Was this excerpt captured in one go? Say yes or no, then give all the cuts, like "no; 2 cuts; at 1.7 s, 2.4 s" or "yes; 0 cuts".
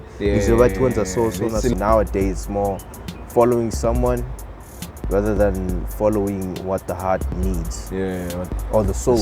no; 1 cut; at 1.7 s